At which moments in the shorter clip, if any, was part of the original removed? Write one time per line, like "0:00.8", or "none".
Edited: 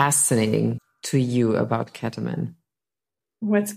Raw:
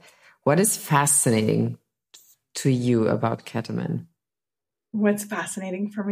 0:00.9